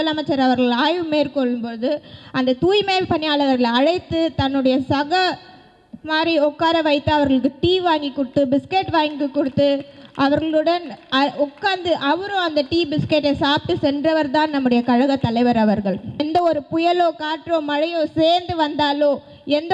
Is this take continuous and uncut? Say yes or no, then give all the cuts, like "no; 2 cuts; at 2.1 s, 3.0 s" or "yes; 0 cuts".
no; 1 cut; at 16.2 s